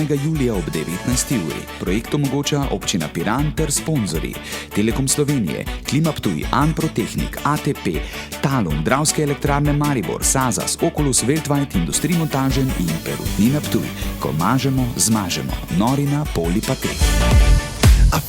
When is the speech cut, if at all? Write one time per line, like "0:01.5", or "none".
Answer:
0:17.1